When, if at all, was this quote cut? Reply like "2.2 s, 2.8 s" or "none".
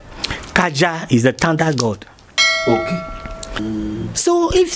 3.6 s

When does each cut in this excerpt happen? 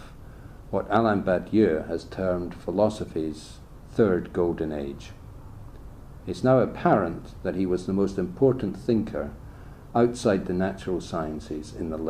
10.2 s

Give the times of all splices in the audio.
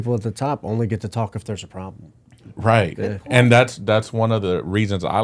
none

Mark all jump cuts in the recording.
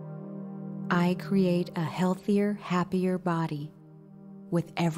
0.9 s

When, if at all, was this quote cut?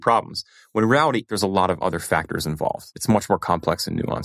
1.3 s, 2.9 s

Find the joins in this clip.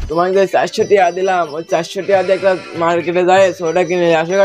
none

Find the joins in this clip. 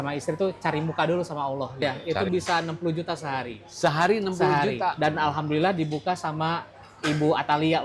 1.8 s, 5.0 s

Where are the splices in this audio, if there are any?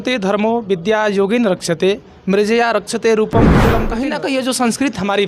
3.9 s

